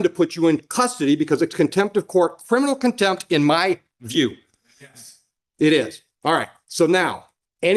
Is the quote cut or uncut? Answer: uncut